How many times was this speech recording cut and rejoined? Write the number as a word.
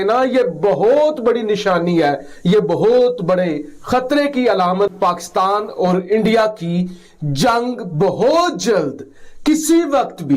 one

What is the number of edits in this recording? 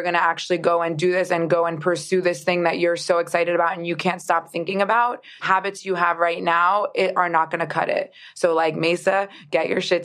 one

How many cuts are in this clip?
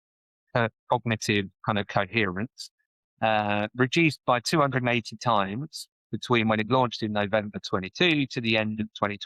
zero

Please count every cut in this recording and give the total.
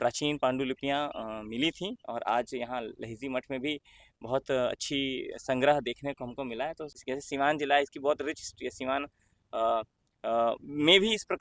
one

